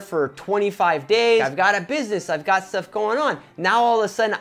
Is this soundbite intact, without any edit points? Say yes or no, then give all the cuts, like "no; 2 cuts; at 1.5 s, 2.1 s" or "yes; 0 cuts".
no; 1 cut; at 1.5 s